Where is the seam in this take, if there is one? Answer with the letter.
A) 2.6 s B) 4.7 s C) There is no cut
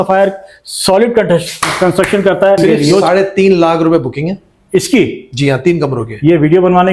A